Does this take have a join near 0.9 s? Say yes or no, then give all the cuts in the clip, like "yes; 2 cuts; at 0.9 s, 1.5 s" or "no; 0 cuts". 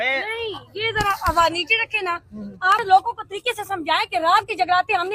no; 1 cut; at 2.8 s